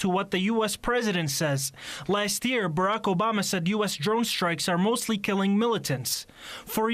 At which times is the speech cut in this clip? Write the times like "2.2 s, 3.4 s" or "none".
2.2 s